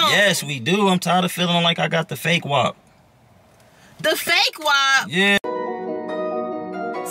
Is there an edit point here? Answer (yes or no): yes